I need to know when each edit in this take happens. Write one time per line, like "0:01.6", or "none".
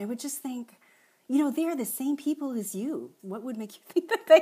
0:03.2